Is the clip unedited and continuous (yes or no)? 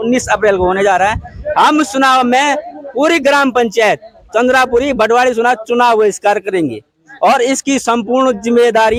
yes